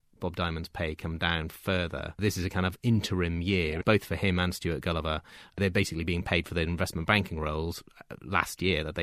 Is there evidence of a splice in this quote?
no; 0 cuts

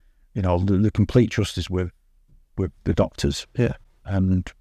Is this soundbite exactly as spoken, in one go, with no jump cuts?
yes; 0 cuts

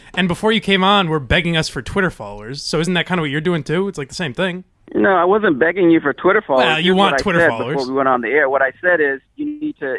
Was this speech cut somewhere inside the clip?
no; 0 cuts

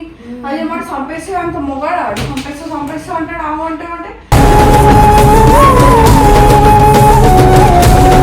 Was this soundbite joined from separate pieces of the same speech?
no; 0 cuts

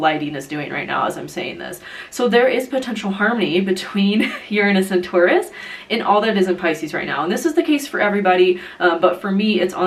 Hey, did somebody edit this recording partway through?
no; 0 cuts

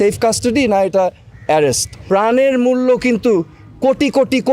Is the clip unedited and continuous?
no; 1 cut; at 1.9 s

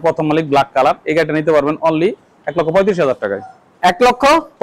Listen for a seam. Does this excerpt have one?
no; 0 cuts

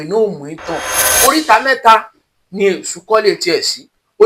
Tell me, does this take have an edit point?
yes; 1 cut; at 1.1 s

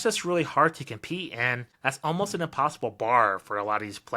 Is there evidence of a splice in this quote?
yes; 1 cut; at 1.6 s

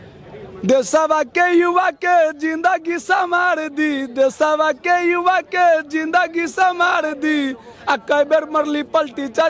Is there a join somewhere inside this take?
no; 0 cuts

